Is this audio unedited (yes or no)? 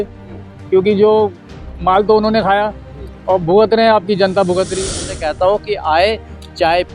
no